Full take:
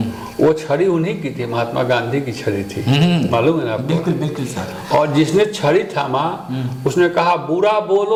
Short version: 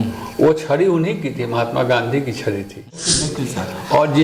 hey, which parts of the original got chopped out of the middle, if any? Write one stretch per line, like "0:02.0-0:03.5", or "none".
0:02.9-0:03.9